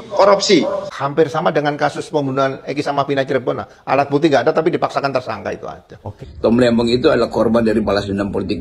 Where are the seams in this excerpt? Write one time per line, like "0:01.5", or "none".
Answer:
0:00.9
0:06.1